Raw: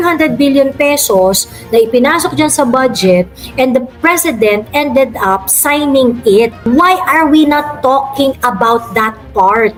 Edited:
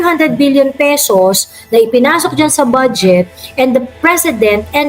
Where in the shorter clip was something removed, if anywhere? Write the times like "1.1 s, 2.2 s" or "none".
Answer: none

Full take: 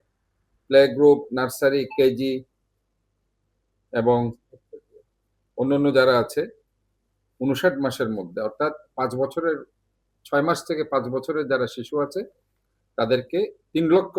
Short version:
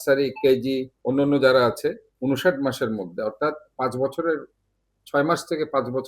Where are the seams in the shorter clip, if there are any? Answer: 0.9 s, 2.1 s

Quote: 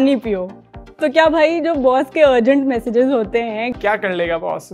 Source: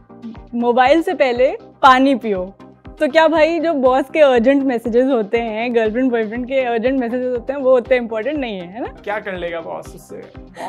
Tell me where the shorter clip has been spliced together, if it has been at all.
3.7 s

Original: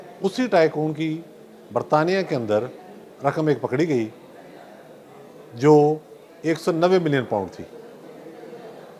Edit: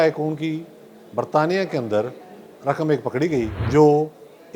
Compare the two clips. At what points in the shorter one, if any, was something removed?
3.6 s

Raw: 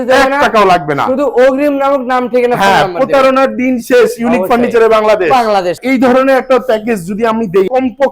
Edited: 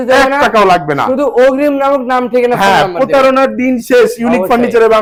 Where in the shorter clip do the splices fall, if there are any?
none

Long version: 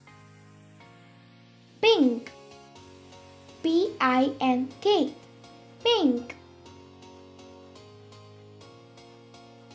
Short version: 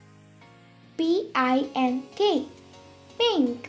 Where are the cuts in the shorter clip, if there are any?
none

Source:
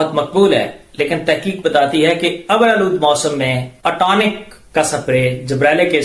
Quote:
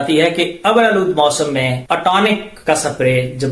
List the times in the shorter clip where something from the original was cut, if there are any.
1.8 s, 2.5 s

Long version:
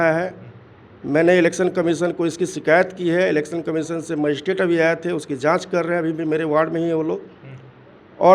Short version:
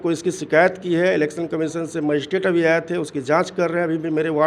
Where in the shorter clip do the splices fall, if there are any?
none

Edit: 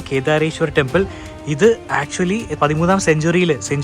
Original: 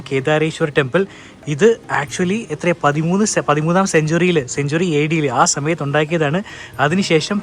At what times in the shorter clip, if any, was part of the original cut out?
2.6 s

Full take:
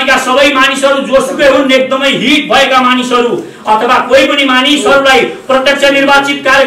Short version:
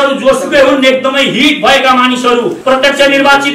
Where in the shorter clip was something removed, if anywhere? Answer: 2.6 s

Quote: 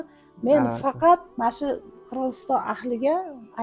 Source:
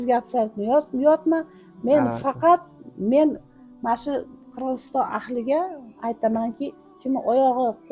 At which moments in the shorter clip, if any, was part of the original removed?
1.3 s

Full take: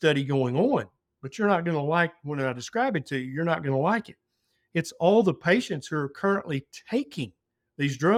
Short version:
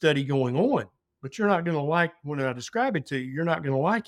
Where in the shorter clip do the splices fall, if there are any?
none

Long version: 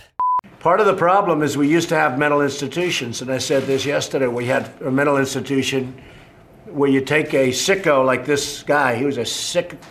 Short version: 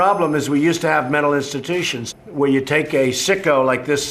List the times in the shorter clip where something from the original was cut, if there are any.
2.0 s

